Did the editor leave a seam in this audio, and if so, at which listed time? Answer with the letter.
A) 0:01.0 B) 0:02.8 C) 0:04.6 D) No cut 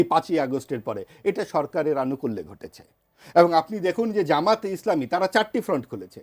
D